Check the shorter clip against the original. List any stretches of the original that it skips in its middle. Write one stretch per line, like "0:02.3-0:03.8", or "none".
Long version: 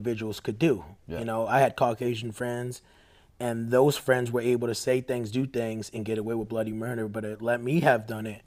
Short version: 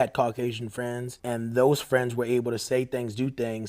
0:02.7-0:03.3